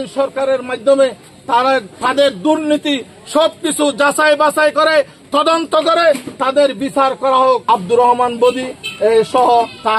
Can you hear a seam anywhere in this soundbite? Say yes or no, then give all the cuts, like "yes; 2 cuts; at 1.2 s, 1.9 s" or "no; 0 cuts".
yes; 1 cut; at 7.6 s